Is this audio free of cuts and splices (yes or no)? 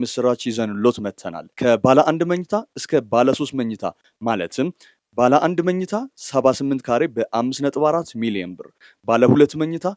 yes